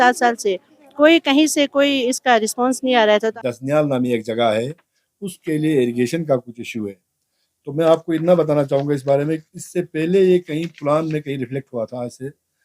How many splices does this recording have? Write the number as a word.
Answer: one